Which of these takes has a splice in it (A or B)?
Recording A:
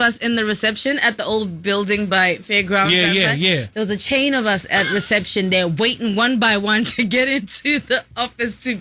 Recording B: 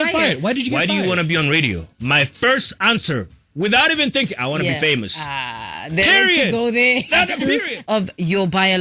B